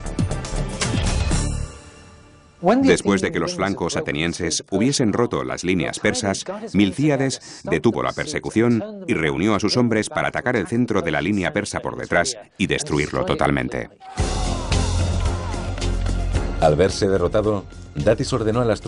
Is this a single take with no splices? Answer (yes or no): no